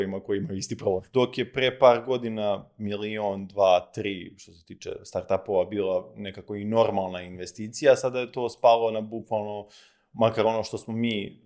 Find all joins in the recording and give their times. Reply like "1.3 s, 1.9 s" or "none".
1.0 s